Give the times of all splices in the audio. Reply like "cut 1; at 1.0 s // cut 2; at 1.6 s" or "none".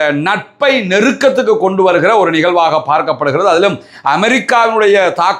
none